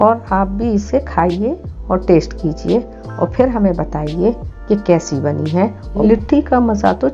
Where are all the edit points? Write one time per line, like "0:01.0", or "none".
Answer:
0:05.9